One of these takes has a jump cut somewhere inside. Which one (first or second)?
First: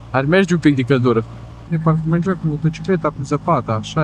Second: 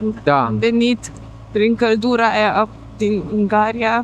first